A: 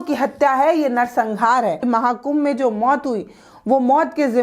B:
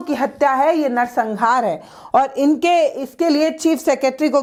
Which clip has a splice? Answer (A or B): A